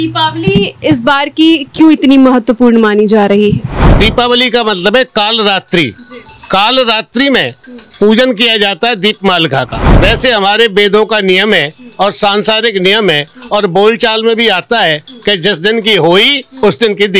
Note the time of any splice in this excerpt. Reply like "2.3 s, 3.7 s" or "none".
3.8 s, 9.8 s